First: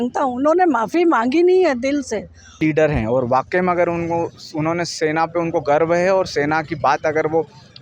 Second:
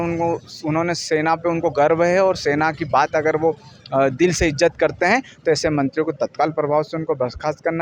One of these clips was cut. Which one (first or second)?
first